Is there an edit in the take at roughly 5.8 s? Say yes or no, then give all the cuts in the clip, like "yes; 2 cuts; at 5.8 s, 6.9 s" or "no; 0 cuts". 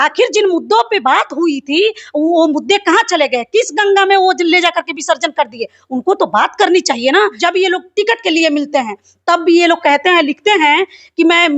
no; 1 cut; at 7.3 s